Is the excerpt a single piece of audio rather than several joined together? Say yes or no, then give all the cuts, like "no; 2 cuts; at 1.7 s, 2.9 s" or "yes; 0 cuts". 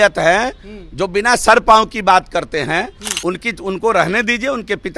no; 1 cut; at 3.0 s